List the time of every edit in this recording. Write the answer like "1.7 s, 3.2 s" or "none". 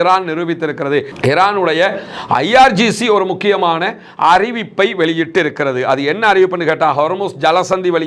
none